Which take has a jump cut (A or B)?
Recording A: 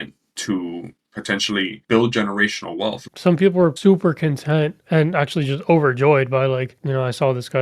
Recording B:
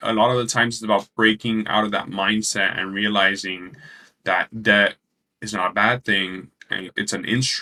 A